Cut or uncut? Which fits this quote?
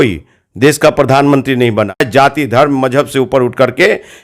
cut